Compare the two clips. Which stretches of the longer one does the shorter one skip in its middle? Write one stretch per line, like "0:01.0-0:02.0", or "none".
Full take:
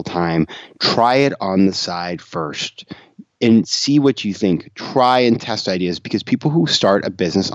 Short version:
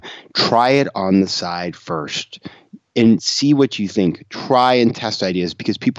none